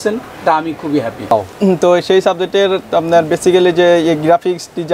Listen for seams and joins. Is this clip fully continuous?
no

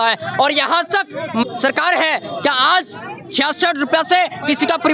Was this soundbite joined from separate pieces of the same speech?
yes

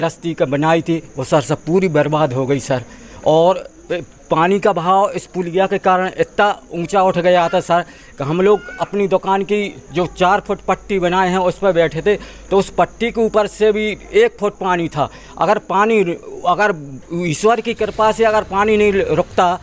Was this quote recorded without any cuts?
yes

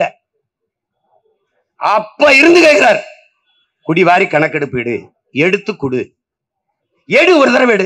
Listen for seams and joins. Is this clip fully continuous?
yes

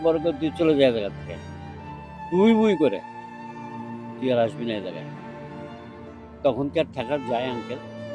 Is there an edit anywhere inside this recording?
yes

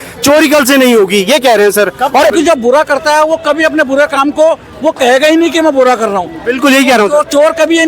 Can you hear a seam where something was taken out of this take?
yes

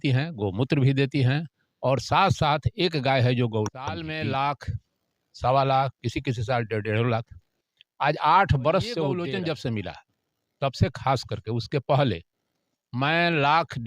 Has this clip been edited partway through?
yes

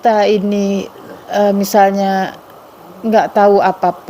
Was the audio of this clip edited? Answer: no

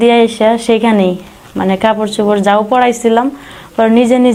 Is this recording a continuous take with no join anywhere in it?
yes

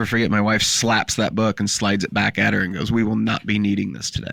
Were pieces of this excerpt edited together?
no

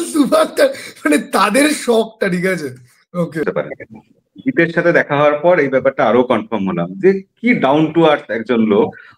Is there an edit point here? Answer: yes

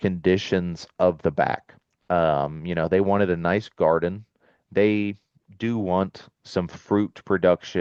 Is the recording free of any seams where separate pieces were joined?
yes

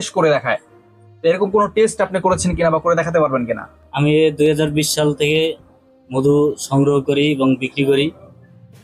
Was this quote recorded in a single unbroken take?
no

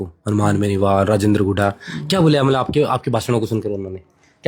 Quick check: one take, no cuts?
yes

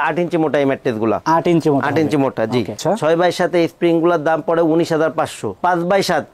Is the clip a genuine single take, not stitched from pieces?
no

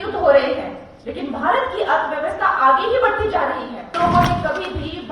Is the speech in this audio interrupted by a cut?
yes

